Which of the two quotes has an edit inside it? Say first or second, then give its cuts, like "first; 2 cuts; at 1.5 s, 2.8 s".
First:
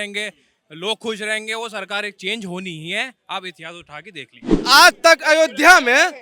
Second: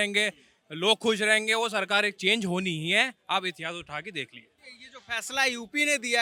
first; 1 cut; at 4.6 s